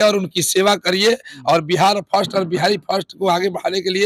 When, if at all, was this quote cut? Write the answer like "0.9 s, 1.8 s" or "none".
none